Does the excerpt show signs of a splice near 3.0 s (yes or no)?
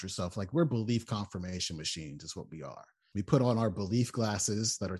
yes